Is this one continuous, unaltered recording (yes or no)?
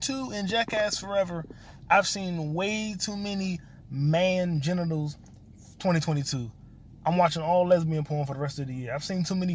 yes